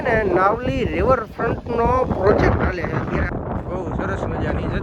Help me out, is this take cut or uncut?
cut